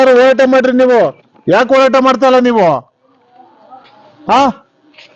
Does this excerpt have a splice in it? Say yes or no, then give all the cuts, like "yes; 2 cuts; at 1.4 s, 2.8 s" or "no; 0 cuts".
no; 0 cuts